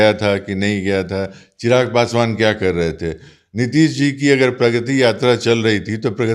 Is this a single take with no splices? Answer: yes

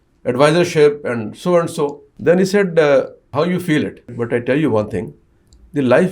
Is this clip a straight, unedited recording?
no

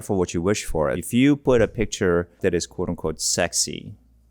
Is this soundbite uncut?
no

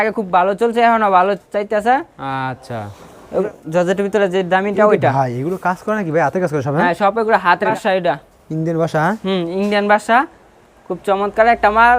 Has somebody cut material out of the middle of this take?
yes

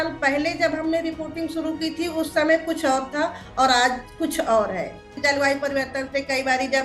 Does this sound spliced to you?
yes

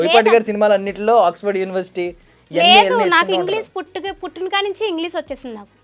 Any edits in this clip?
no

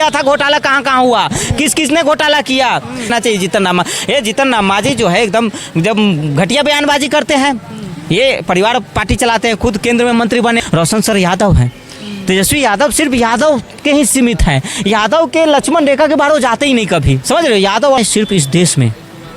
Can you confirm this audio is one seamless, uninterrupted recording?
no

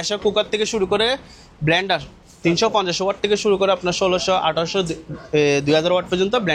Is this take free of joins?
yes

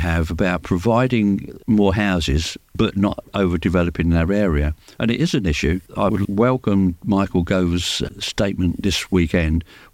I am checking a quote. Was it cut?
yes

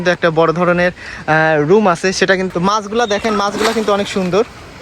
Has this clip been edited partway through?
yes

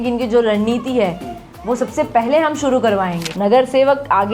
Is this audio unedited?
no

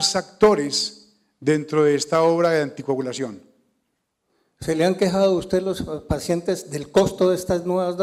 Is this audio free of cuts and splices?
yes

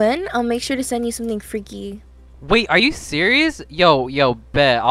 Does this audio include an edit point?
no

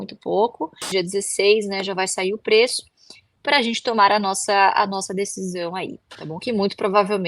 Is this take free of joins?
no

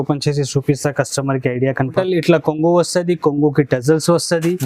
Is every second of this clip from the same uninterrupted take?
no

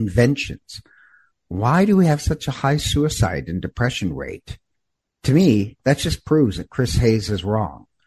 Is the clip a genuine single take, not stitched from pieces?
yes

